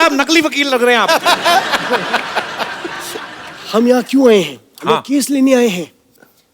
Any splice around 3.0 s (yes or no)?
no